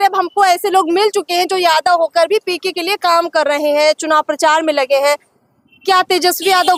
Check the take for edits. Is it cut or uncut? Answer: uncut